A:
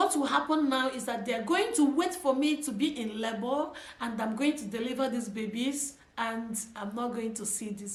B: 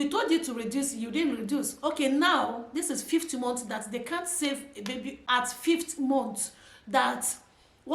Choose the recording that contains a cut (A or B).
B